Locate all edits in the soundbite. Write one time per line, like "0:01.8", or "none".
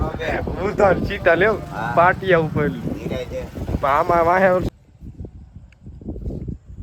0:04.7